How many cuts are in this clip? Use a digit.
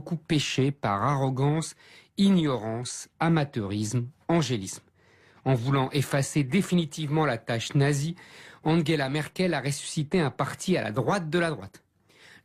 1